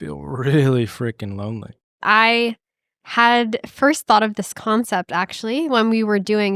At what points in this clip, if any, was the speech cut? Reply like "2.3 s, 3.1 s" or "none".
2.0 s